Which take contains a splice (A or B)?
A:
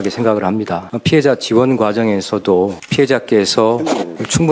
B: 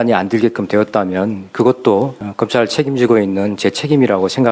A